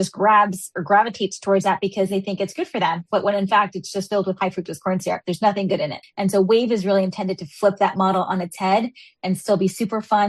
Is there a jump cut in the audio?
yes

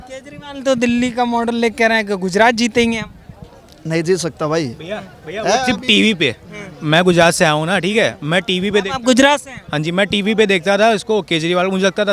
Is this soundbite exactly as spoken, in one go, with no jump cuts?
yes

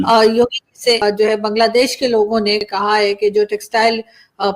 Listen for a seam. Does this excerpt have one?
yes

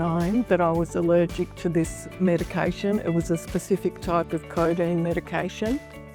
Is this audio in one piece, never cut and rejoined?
yes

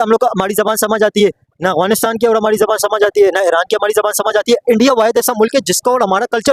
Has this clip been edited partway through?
no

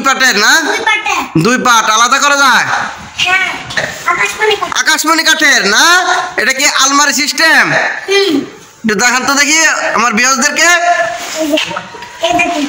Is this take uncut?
no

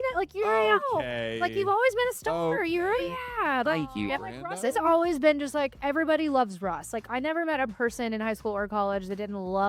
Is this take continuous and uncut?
yes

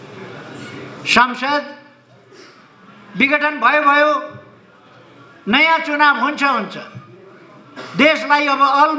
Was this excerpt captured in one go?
yes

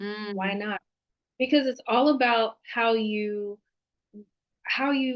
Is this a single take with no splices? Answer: yes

